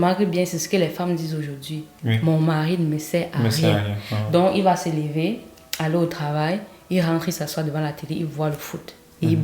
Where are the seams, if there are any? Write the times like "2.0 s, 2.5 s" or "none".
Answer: none